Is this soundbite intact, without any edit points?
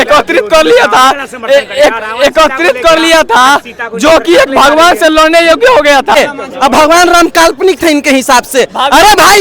no; 1 cut; at 6.1 s

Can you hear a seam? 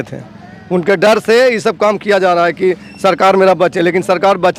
no; 0 cuts

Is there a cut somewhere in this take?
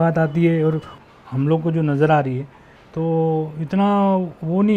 yes; 1 cut; at 0.9 s

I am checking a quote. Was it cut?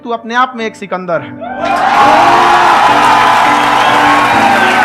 no; 0 cuts

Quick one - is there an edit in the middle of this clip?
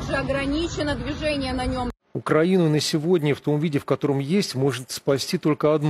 yes; 1 cut; at 2.0 s

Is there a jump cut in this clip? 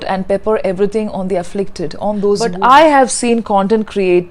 yes; 1 cut; at 2.5 s

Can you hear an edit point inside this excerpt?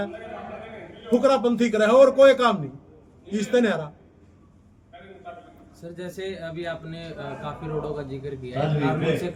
no; 0 cuts

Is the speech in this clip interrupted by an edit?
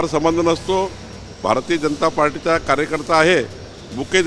no; 0 cuts

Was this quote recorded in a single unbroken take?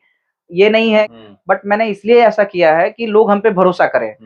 no; 1 cut; at 1.1 s

